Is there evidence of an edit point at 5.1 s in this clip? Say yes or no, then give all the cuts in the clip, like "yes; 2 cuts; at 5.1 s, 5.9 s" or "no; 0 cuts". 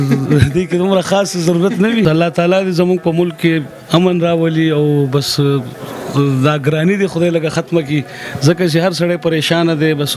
no; 1 cut; at 2.0 s